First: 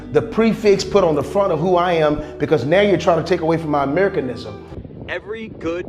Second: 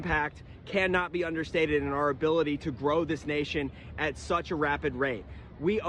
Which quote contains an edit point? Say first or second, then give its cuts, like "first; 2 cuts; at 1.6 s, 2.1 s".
first; 1 cut; at 4.7 s